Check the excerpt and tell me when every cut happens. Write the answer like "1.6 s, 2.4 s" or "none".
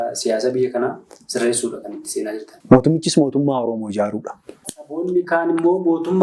2.5 s, 4.8 s